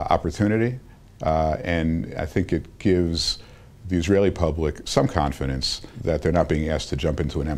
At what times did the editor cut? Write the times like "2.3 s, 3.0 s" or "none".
5.9 s

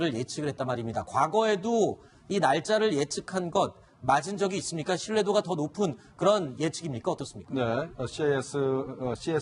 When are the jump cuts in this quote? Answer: 1.1 s

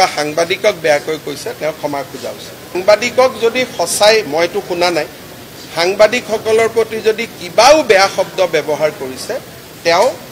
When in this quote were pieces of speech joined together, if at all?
2.7 s

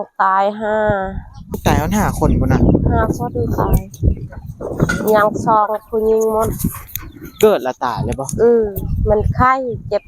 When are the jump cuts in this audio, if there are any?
1.6 s

